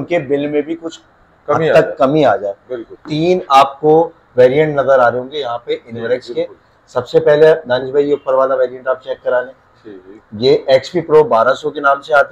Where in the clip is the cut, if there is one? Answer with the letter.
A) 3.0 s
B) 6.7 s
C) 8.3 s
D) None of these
A